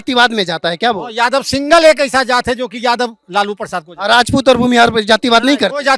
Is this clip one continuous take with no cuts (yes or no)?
yes